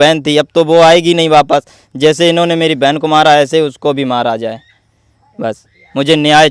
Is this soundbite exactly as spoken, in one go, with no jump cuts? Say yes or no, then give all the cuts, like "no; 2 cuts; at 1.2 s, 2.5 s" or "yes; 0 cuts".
yes; 0 cuts